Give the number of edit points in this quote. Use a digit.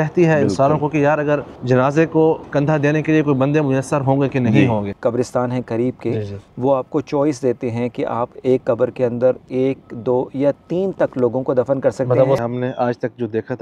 3